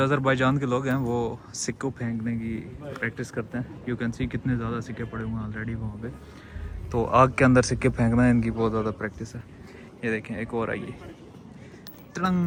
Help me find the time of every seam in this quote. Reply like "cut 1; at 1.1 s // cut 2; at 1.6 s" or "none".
none